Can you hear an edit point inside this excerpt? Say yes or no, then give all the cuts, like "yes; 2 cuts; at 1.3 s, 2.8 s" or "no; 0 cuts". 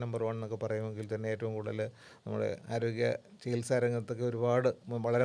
no; 0 cuts